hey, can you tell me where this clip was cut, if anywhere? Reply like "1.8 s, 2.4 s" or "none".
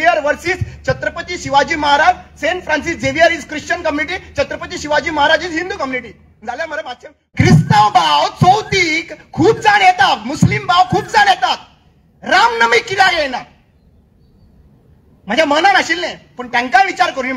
7.2 s